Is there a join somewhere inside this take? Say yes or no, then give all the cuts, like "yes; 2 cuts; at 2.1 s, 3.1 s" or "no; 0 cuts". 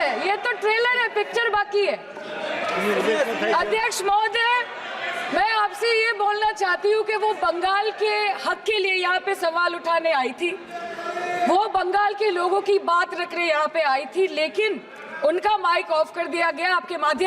no; 0 cuts